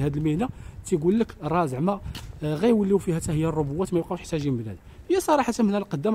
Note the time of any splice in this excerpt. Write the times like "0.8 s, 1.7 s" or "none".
none